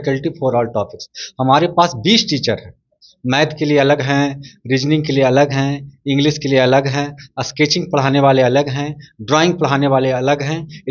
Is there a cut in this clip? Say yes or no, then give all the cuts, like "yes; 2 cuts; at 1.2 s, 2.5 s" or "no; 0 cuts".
no; 0 cuts